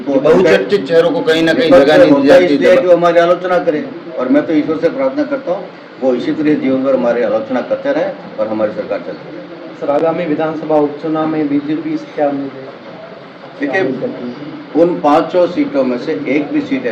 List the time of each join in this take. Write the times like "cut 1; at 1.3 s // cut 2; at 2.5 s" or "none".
none